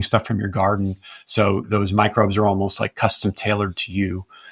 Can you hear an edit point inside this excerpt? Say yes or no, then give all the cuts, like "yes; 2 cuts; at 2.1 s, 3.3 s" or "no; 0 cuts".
yes; 1 cut; at 1.7 s